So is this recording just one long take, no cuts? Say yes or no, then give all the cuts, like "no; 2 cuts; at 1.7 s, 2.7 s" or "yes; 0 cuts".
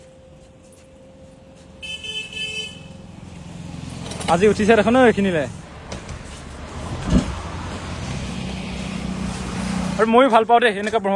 no; 4 cuts; at 5.6 s, 6.8 s, 8.2 s, 9.9 s